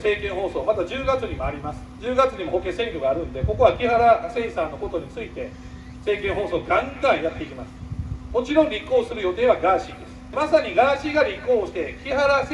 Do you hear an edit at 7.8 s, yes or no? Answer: no